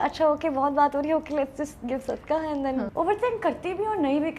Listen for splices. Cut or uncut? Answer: cut